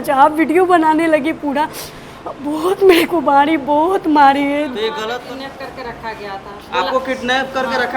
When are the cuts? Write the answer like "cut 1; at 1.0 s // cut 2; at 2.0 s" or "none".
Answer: cut 1; at 5.1 s